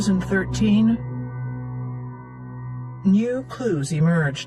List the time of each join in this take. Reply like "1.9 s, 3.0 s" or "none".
3.1 s

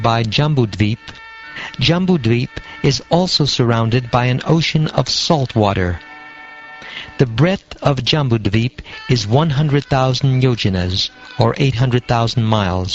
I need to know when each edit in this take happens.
none

